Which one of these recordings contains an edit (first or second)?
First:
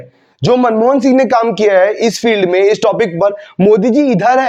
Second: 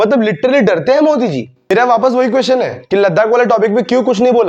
second